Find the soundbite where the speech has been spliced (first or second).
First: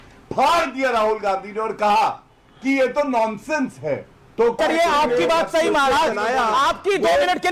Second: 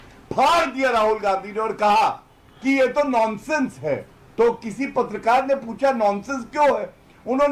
first